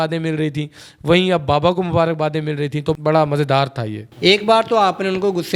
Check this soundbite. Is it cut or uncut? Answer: cut